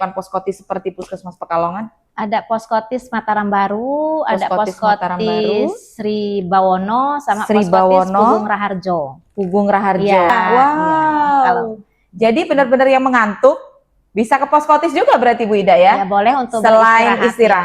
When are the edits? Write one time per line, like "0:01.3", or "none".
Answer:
0:10.3